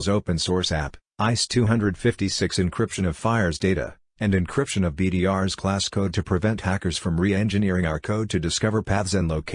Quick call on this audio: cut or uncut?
cut